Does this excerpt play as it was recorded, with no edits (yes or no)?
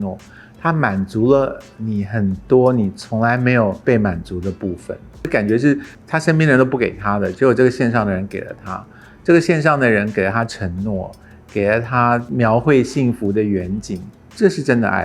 no